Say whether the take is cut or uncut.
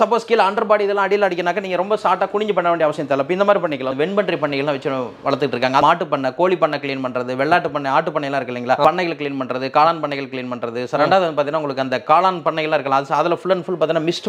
cut